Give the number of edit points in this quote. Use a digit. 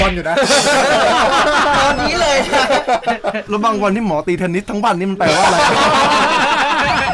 1